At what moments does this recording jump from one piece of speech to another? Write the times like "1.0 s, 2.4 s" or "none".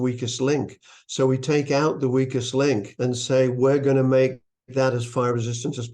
none